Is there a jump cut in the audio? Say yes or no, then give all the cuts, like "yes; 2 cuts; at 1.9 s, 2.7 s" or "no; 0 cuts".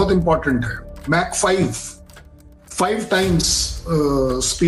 no; 0 cuts